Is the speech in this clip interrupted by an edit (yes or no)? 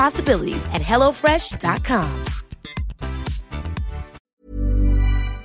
yes